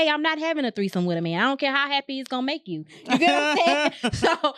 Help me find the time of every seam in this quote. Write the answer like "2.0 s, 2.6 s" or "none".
none